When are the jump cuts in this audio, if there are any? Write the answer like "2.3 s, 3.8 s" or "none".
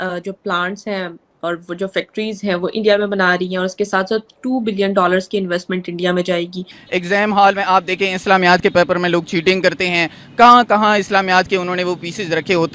6.8 s